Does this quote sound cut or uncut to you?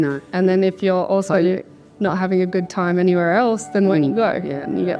uncut